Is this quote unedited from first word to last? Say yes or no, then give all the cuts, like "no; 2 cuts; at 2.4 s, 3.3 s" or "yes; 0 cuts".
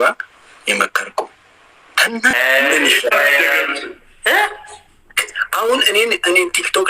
no; 1 cut; at 2.3 s